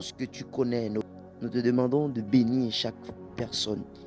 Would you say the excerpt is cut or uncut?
cut